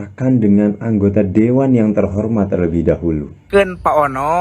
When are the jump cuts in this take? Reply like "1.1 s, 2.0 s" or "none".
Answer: 3.4 s